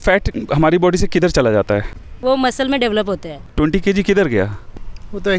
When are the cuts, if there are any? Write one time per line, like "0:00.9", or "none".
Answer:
0:02.1
0:03.4

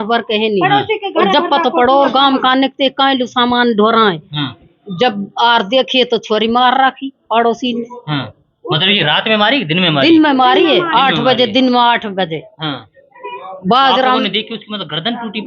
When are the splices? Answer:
none

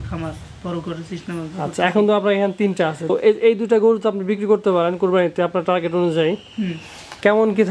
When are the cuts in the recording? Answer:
0:03.1

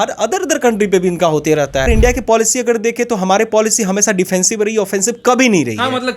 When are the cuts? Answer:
0:01.9

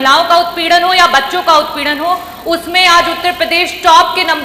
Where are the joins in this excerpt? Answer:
none

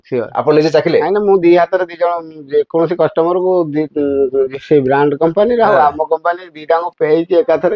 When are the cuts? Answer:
none

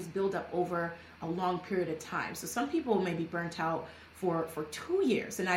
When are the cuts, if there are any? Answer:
none

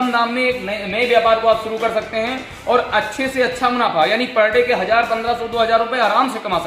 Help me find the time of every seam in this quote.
none

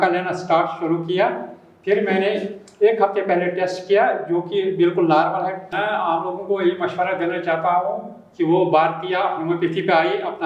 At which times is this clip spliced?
0:05.6

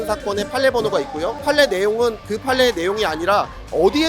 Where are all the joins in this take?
0:01.4

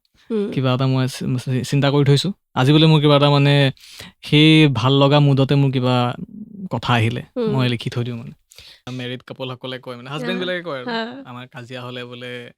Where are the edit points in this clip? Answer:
0:08.8

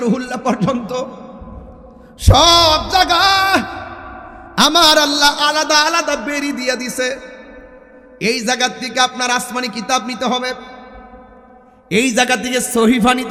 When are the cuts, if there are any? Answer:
none

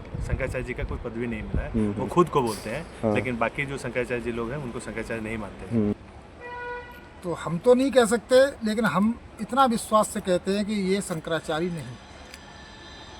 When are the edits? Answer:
0:06.0

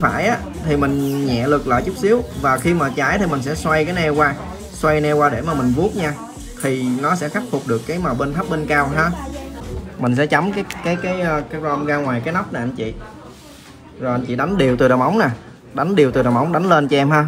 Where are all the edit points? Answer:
0:09.5

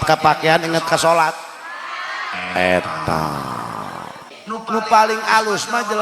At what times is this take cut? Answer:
0:04.3

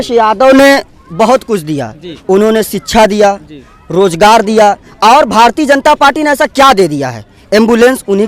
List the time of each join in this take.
none

